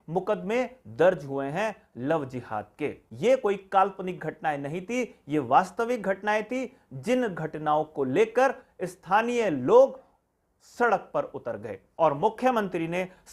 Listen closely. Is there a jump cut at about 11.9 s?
yes; 2 cuts; at 3.0 s, 11.9 s

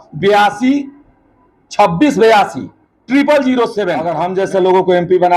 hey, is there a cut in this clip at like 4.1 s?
yes; 1 cut; at 4.1 s

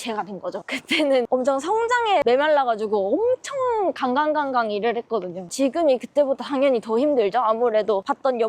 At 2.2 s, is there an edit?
yes; 3 cuts; at 1.1 s, 2.2 s, 5.5 s

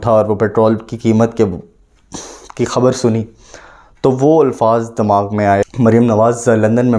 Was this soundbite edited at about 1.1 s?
no; 1 cut; at 5.6 s

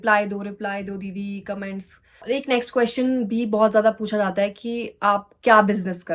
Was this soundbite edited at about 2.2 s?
yes; 1 cut; at 2.2 s

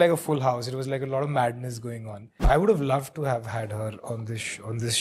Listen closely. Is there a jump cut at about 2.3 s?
yes; 1 cut; at 2.3 s

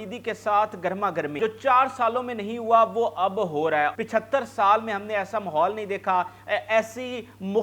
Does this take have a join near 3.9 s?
yes; 2 cuts; at 1.4 s, 3.9 s

